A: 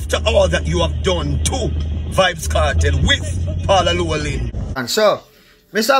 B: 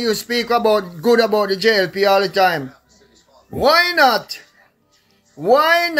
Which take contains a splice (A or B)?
A